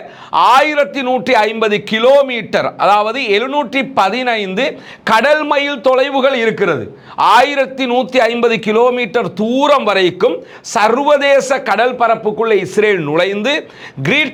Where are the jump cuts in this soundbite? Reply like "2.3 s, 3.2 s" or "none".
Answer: none